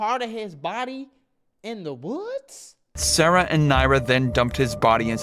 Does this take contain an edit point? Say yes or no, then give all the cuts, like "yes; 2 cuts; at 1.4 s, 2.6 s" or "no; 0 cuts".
yes; 1 cut; at 3.0 s